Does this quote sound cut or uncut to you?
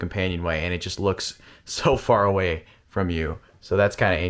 uncut